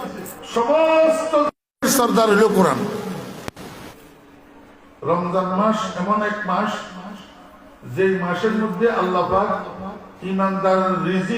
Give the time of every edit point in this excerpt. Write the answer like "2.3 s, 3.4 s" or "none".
3.9 s